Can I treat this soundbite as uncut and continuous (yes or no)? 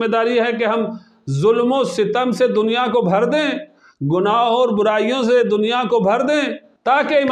yes